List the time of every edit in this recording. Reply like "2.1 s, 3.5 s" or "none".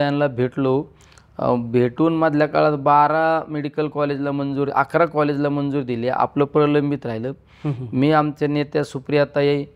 none